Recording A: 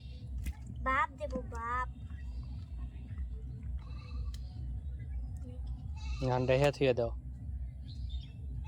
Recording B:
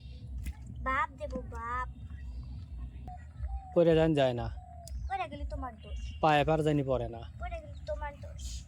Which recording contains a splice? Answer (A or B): B